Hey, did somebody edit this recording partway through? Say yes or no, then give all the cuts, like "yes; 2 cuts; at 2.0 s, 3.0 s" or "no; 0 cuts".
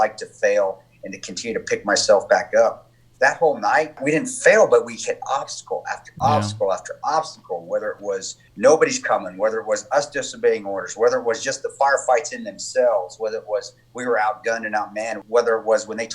yes; 3 cuts; at 4.0 s, 8.4 s, 15.2 s